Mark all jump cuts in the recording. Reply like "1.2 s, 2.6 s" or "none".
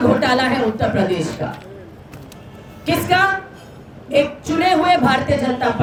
none